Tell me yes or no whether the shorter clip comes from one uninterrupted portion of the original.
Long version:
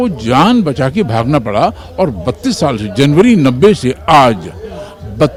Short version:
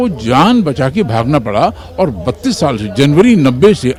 yes